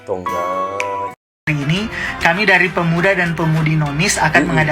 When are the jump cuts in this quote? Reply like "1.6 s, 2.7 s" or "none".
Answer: 1.5 s